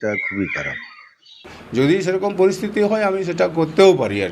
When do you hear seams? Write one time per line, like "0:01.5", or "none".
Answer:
0:01.5